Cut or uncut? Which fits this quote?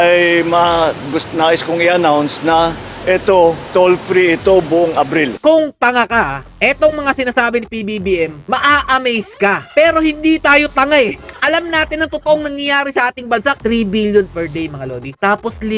cut